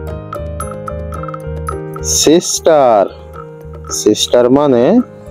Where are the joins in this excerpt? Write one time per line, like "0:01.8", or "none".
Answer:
0:02.2